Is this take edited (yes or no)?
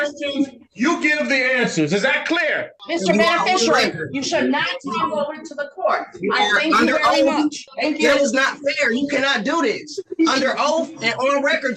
yes